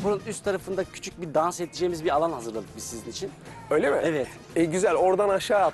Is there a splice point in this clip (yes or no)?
no